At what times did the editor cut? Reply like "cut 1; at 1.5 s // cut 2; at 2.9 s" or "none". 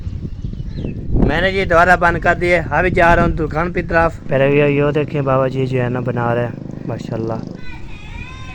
cut 1; at 1.0 s // cut 2; at 4.2 s // cut 3; at 7.6 s